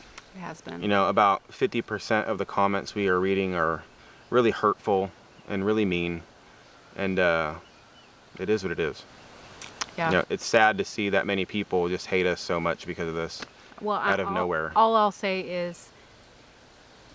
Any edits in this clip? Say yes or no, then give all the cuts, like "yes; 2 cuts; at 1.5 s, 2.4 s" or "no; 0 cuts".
no; 0 cuts